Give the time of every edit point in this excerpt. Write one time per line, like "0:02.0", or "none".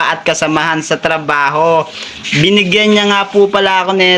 0:02.1